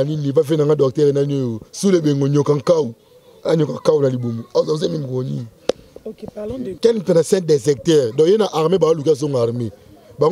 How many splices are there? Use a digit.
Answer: 1